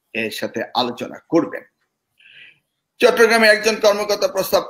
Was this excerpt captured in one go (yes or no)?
yes